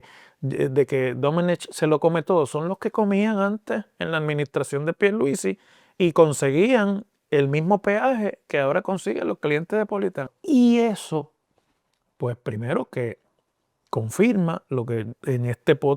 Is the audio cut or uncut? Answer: cut